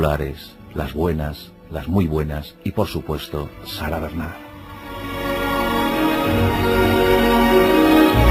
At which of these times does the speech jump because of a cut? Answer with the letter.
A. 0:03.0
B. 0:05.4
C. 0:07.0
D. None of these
C